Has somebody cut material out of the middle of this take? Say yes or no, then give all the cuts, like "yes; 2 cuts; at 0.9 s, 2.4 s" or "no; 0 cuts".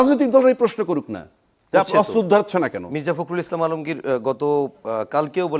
no; 0 cuts